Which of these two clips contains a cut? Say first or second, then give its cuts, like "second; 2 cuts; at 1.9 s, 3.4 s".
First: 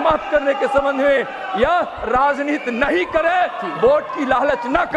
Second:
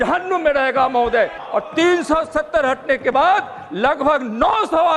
second; 1 cut; at 1.4 s